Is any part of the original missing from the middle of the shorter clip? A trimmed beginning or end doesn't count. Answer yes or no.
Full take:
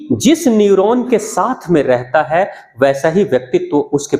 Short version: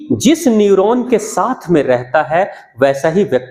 no